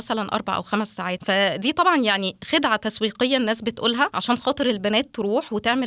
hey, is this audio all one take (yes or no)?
no